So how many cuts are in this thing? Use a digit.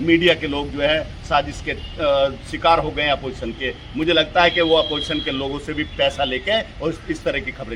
0